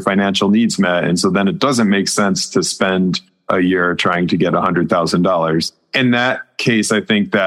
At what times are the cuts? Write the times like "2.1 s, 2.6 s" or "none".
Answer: 3.3 s